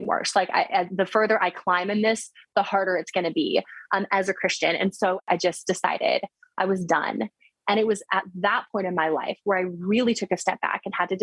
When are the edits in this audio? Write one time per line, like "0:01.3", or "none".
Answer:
0:05.2
0:07.5